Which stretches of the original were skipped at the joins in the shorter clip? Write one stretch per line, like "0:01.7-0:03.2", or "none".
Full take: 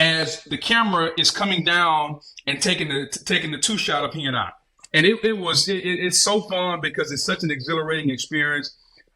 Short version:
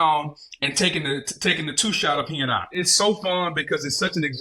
0:04.7-0:06.1

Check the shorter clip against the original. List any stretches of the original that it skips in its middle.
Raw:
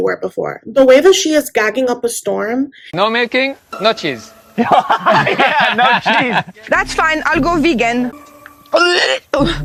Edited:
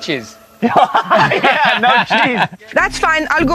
none

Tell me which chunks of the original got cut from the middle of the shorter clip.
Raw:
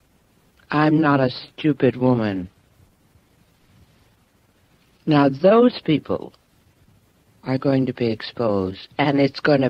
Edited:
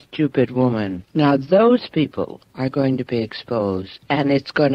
0:02.5-0:04.9
0:06.3-0:07.3

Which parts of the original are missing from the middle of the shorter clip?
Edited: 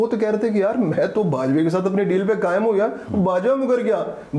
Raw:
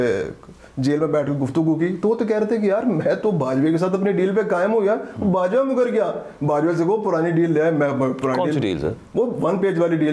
none

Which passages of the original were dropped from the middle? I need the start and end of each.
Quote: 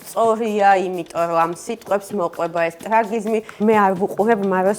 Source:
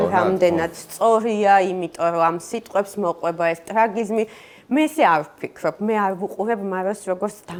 0:04.4-0:05.8

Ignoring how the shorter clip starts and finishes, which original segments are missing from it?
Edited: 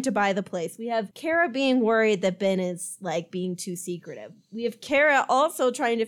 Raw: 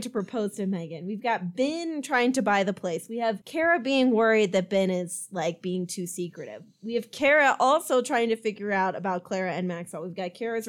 none

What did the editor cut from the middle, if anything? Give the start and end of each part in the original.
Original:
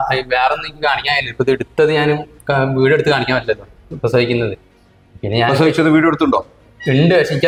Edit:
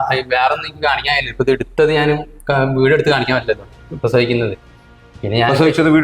none

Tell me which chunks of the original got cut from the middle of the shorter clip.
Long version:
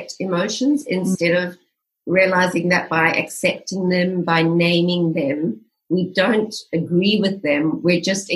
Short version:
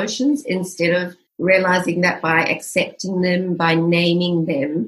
0:01.6-0:01.9

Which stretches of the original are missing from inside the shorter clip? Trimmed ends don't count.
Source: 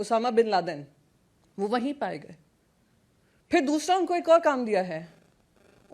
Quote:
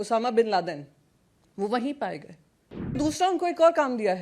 0:03.0-0:03.6

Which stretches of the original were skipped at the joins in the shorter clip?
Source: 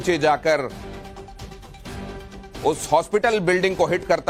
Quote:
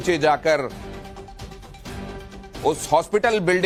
none

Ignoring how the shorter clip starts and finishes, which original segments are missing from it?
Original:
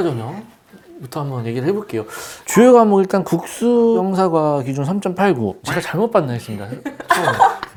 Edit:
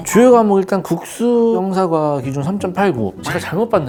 none

